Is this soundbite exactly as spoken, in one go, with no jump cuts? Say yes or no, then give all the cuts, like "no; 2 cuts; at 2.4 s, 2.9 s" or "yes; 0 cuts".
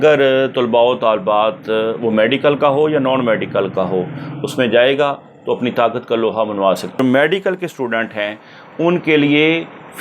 no; 1 cut; at 7.0 s